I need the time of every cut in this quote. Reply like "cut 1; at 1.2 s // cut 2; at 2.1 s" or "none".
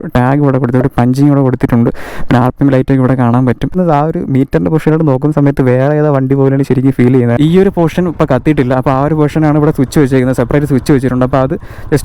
cut 1; at 3.8 s // cut 2; at 7.3 s